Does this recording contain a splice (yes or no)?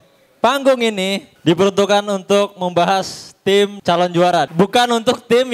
yes